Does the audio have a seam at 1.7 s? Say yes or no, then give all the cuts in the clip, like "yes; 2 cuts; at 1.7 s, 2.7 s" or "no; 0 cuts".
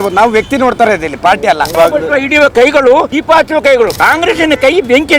yes; 3 cuts; at 1.7 s, 3.1 s, 3.9 s